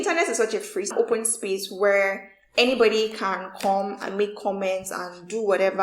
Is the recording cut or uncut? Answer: cut